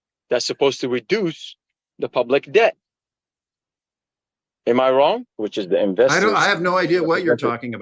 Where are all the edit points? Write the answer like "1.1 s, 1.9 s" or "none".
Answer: 5.3 s